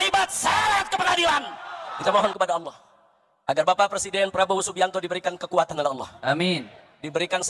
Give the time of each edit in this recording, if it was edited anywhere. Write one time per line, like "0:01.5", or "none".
none